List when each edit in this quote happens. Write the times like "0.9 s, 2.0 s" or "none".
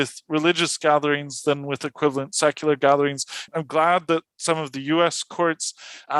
3.4 s